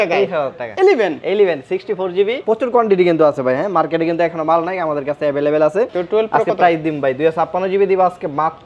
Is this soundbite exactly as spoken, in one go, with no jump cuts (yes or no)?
no